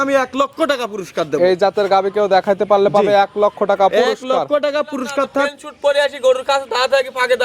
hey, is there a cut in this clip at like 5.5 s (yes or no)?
yes